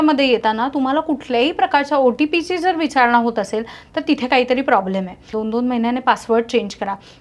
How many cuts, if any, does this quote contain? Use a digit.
1